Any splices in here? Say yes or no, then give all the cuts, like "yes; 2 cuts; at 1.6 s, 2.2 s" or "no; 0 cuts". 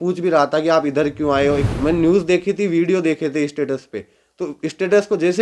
yes; 1 cut; at 1.7 s